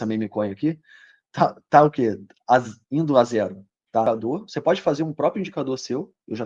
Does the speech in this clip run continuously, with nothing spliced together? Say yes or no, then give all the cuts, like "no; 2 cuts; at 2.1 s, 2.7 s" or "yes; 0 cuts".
no; 1 cut; at 4.0 s